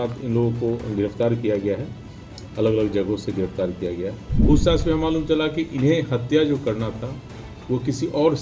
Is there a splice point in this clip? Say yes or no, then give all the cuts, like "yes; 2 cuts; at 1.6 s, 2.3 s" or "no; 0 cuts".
yes; 1 cut; at 4.3 s